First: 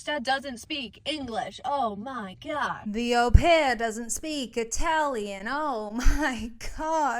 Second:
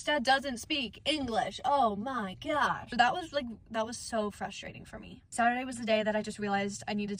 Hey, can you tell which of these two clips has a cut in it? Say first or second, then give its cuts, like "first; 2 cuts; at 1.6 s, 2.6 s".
first; 1 cut; at 2.8 s